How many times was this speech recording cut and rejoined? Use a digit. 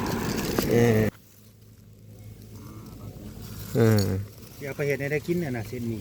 1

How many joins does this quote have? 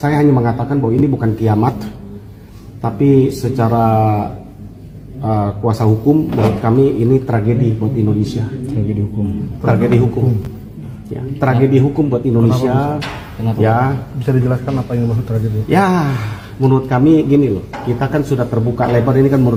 0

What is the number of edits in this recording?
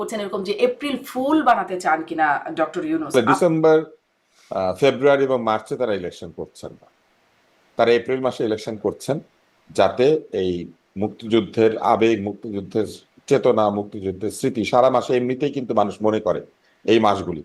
1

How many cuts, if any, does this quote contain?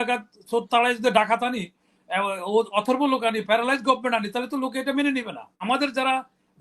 1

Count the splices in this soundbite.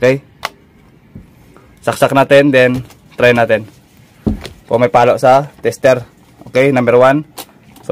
0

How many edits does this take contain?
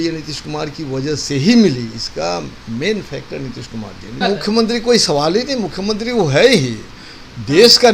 1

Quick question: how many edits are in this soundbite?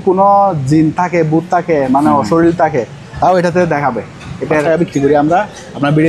1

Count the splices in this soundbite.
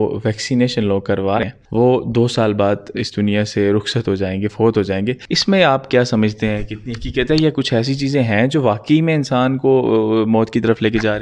2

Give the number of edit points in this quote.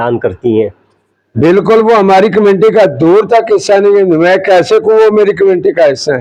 0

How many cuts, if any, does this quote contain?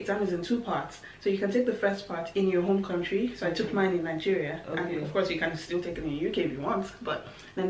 0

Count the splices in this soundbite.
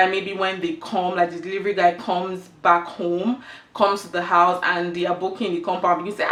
0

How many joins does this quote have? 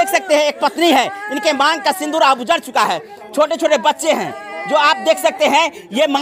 0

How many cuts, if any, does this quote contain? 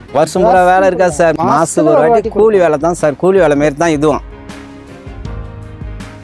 2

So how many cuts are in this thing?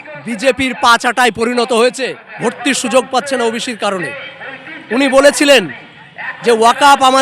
1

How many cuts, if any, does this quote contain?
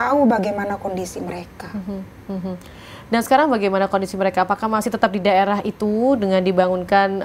0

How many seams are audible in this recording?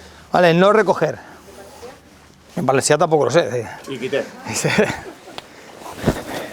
0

